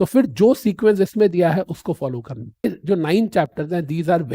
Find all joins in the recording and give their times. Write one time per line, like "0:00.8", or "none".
0:02.6